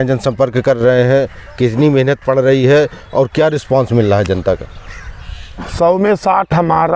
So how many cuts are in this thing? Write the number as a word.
zero